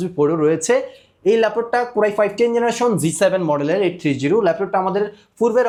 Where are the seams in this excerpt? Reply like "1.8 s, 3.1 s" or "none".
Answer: none